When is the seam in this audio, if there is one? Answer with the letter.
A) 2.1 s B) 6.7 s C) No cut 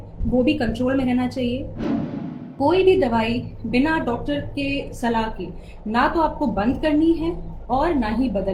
A